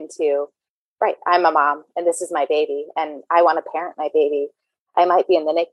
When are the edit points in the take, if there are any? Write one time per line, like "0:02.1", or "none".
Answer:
none